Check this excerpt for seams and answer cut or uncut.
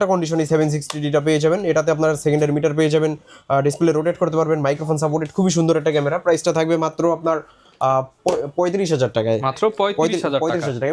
uncut